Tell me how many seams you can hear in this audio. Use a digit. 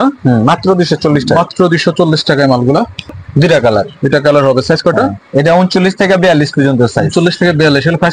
1